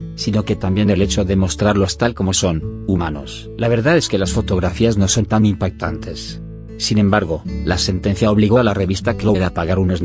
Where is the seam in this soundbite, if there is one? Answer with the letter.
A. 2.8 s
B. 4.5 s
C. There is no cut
B